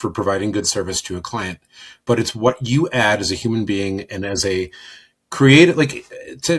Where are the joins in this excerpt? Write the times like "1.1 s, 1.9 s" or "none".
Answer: none